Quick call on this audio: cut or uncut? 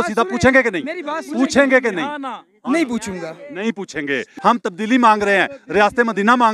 cut